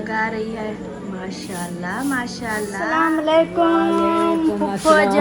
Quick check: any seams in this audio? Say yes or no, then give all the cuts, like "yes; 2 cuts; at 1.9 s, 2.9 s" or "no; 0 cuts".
yes; 1 cut; at 2.8 s